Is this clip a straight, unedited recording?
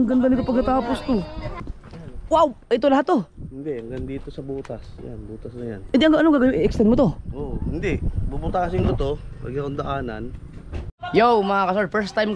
no; 2 cuts; at 1.7 s, 11.0 s

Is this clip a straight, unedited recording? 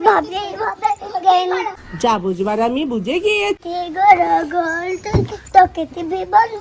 no; 2 cuts; at 2.0 s, 3.6 s

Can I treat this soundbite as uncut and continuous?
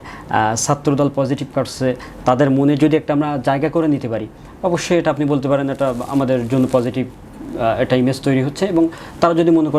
yes; 0 cuts

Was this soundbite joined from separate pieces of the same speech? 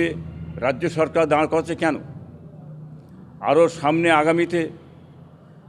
no; 0 cuts

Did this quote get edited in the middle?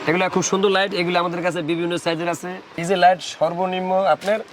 yes; 1 cut; at 2.8 s

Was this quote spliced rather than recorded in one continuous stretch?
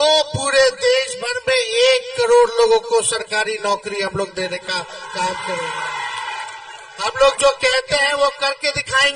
yes; 1 cut; at 6.6 s

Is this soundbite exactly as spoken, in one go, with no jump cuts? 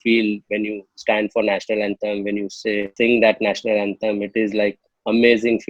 yes; 0 cuts

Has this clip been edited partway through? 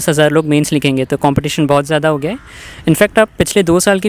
no; 0 cuts

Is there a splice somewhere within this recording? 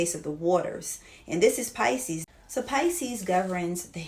yes; 1 cut; at 2.2 s

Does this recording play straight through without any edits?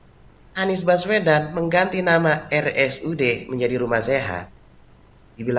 yes; 0 cuts

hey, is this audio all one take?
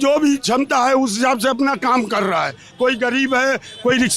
yes; 0 cuts

